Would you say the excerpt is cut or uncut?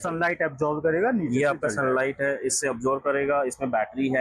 uncut